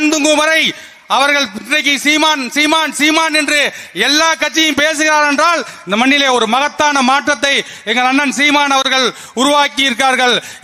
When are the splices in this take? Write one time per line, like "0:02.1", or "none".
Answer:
none